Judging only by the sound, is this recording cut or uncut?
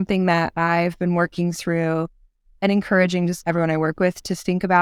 cut